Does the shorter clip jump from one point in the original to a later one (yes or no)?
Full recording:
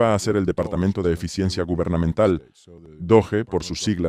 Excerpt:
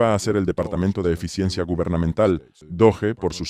yes